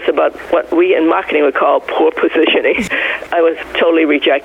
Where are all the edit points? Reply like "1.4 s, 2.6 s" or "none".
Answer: 2.8 s